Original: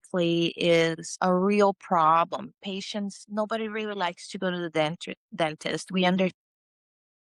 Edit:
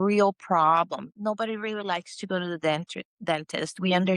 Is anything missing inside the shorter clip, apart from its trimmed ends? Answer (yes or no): yes